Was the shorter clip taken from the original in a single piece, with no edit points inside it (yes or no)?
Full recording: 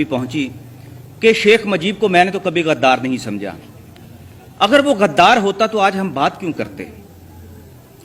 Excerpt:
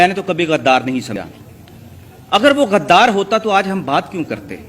no